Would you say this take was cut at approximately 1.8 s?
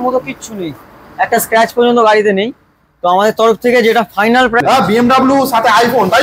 no; 1 cut; at 4.6 s

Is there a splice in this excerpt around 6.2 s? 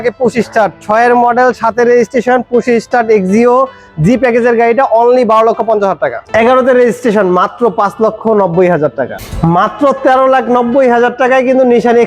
yes; 1 cut; at 6.2 s

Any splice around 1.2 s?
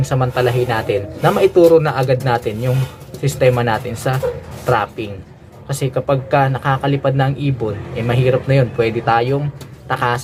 no; 0 cuts

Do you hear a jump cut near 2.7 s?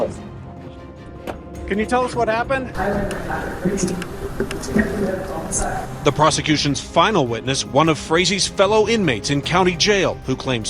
yes; 1 cut; at 2.7 s

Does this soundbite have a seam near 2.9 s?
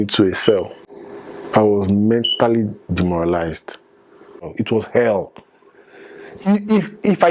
no; 1 cut; at 4.5 s

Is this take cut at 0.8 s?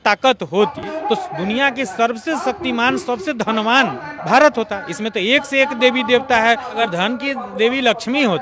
yes; 3 cuts; at 0.8 s, 4.1 s, 6.8 s

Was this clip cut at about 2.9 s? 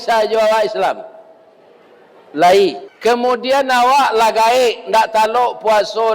yes; 1 cut; at 2.9 s

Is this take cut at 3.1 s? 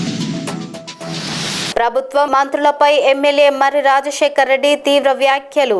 no; 1 cut; at 1.7 s

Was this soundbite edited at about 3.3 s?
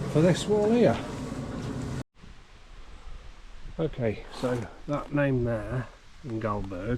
no; 1 cut; at 2.0 s

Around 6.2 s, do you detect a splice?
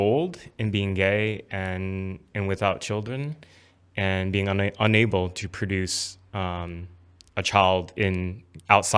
no; 0 cuts

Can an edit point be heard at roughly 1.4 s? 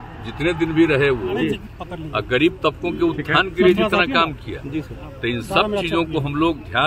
yes; 1 cut; at 1.4 s

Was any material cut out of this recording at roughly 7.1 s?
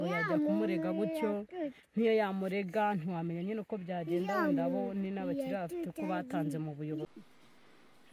yes; 1 cut; at 7.1 s

